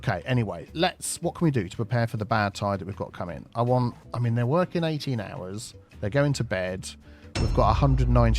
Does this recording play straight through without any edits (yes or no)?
yes